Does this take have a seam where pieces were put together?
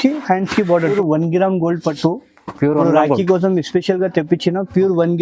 yes; 1 cut; at 0.9 s

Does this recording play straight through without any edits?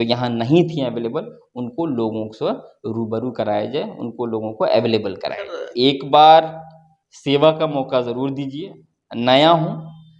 no; 1 cut; at 5.6 s

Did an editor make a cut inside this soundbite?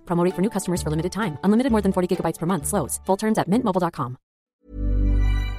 yes; 1 cut; at 4.3 s

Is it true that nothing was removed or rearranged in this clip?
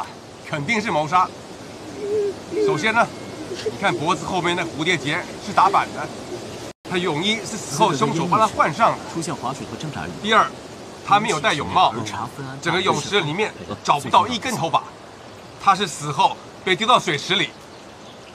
yes; 0 cuts

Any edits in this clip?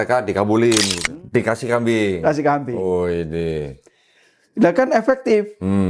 yes; 1 cut; at 1.0 s

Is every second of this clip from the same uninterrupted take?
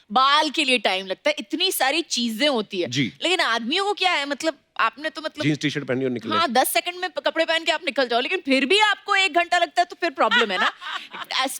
yes; 0 cuts

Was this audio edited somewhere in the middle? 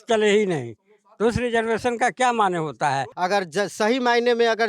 yes; 1 cut; at 3.1 s

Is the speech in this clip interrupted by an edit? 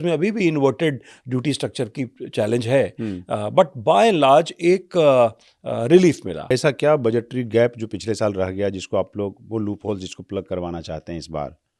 yes; 1 cut; at 6.5 s

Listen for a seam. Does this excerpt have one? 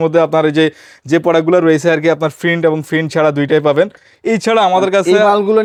no; 0 cuts

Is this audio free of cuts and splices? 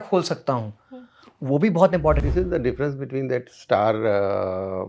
no; 1 cut; at 2.2 s

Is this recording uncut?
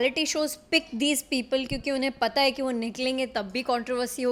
yes; 0 cuts

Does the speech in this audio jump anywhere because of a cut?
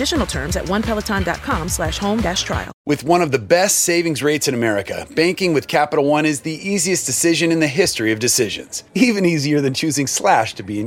yes; 1 cut; at 2.7 s

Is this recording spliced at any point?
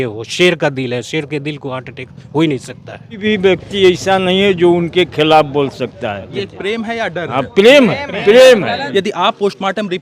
yes; 3 cuts; at 3.2 s, 6.4 s, 8.8 s

